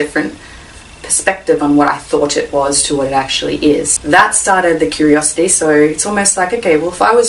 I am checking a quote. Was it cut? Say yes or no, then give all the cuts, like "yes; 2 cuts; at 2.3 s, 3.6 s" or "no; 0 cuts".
yes; 1 cut; at 3.9 s